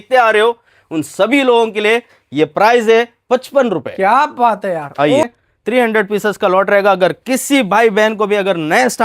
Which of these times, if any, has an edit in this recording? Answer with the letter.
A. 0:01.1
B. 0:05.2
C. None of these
B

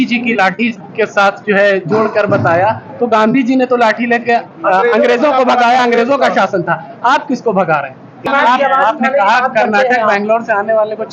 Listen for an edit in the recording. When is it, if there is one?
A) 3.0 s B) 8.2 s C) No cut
B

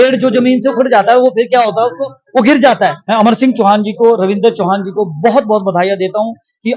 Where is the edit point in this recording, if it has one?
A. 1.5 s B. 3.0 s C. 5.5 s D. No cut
B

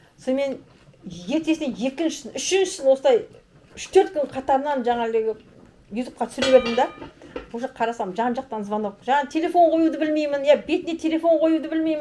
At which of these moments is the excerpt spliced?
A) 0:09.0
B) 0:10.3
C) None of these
C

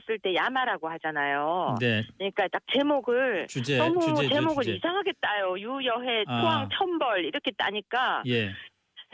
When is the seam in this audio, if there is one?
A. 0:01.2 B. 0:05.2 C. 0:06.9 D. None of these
C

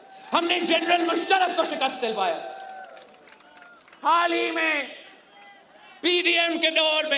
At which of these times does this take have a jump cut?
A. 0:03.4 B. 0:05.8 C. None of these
C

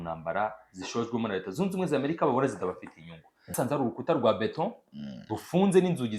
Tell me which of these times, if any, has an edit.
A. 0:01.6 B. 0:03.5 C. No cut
B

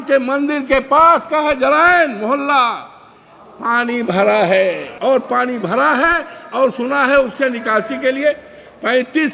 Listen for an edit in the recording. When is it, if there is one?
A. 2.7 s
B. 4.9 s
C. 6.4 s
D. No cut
B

